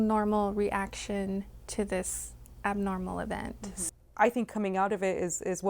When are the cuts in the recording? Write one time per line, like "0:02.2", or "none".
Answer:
0:03.7

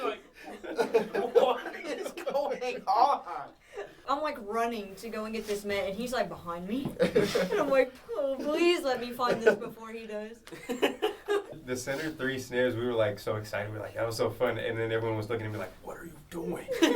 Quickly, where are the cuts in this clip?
0:03.9
0:11.6

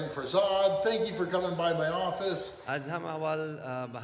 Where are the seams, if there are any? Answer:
0:02.5

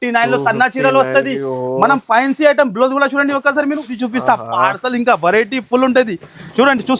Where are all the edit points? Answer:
0:04.0

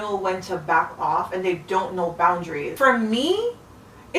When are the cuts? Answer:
0:02.7

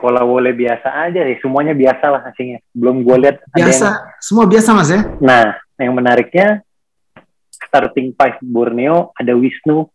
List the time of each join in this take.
0:05.1

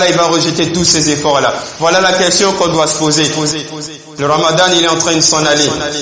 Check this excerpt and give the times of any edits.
0:04.0

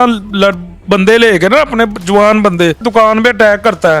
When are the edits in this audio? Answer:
0:02.8

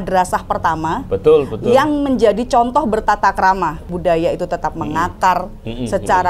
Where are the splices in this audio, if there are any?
0:03.8

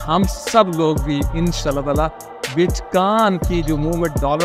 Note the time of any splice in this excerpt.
none

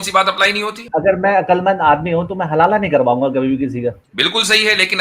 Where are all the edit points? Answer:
0:00.8
0:04.1

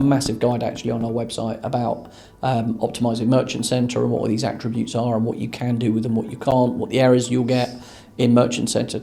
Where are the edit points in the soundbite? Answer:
none

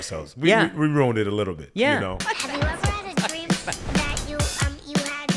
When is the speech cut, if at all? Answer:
0:02.2

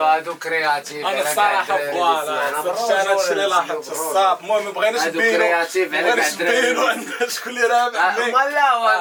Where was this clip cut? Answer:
none

